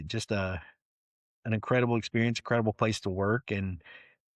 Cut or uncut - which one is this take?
uncut